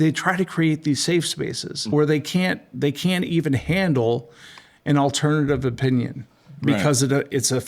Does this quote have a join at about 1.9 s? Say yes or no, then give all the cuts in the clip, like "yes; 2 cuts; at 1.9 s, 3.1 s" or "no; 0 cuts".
yes; 1 cut; at 1.9 s